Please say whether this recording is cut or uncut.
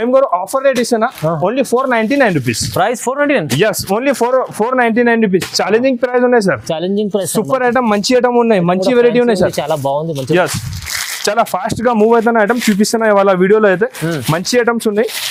uncut